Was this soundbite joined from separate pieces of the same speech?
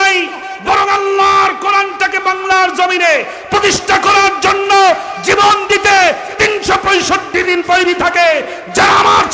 no; 0 cuts

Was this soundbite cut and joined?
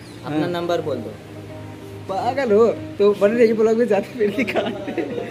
no; 0 cuts

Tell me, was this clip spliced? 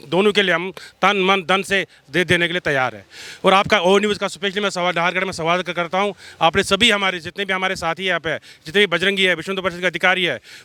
no; 0 cuts

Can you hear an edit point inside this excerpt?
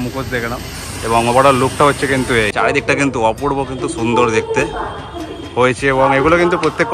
yes; 1 cut; at 2.5 s

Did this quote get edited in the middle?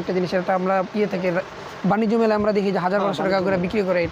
no; 0 cuts

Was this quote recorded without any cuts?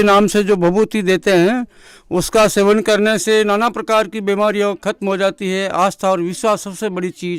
yes; 0 cuts

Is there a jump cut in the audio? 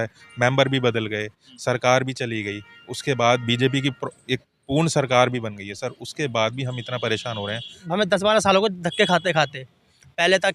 yes; 1 cut; at 7.8 s

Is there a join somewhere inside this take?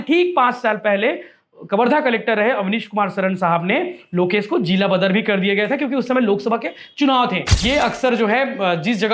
yes; 1 cut; at 7.5 s

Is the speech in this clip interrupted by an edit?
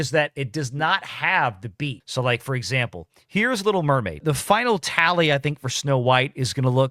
no; 0 cuts

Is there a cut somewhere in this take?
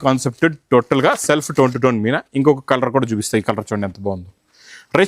no; 0 cuts

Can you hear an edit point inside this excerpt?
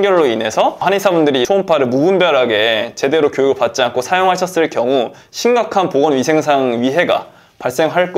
yes; 1 cut; at 1.3 s

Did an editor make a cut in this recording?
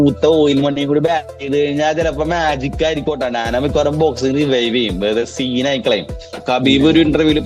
yes; 1 cut; at 6.4 s

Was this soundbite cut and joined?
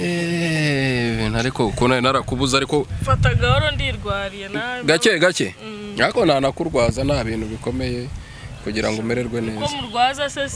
no; 0 cuts

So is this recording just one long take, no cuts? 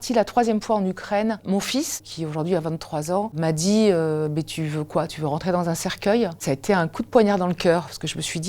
no; 3 cuts; at 2.0 s, 3.3 s, 6.4 s

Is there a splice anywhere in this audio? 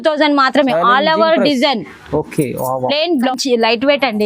yes; 1 cut; at 3.3 s

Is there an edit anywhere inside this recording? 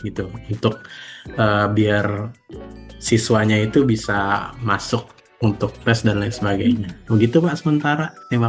no; 0 cuts

